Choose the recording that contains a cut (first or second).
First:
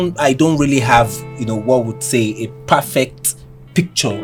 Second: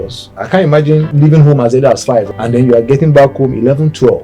second